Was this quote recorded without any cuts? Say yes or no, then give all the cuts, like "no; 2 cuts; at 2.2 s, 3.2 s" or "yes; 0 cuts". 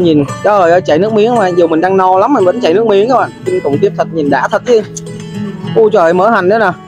yes; 0 cuts